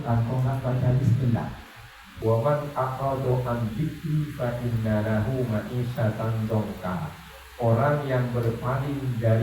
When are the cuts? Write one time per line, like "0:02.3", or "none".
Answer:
0:02.1